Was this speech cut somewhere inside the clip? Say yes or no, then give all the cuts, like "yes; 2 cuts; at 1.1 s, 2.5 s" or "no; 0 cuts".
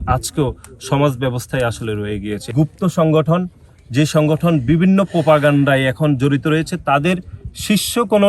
yes; 1 cut; at 2.4 s